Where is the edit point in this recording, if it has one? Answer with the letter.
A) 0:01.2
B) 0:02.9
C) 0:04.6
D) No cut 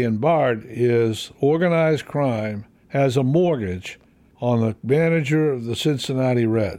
C